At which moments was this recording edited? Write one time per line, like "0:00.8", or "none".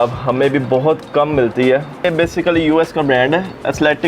0:02.0